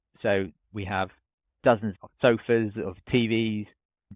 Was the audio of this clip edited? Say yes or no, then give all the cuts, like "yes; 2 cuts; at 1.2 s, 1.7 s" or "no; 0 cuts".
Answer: no; 0 cuts